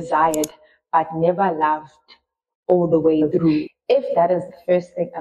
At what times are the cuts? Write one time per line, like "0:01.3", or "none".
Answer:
0:03.7